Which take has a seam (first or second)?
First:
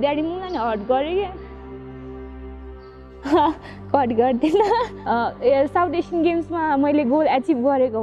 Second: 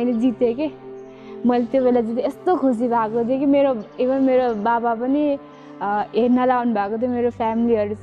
first